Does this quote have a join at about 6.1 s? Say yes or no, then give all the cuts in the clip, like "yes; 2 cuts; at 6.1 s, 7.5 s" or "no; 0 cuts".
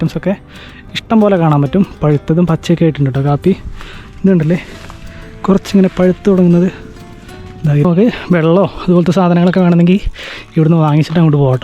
no; 1 cut; at 7.8 s